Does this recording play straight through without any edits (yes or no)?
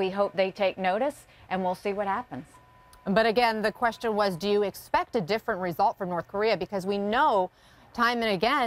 yes